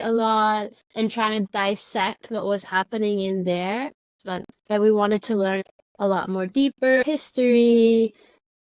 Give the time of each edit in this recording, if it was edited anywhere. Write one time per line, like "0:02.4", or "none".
0:04.2
0:05.6
0:07.0